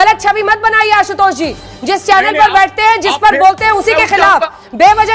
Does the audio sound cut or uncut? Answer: uncut